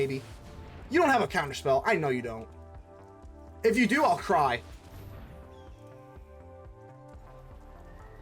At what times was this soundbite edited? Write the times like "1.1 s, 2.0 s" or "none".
7.2 s